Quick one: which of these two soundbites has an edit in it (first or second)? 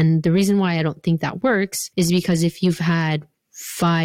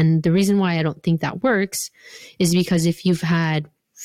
first